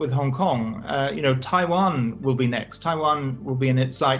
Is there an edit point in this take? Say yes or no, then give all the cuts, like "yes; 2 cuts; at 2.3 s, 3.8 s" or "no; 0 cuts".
no; 0 cuts